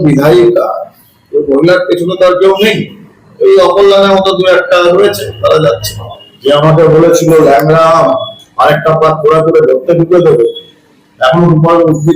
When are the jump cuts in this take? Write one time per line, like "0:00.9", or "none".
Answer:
0:06.2